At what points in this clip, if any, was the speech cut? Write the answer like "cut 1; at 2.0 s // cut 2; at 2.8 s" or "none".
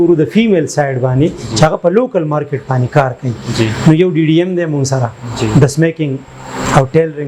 none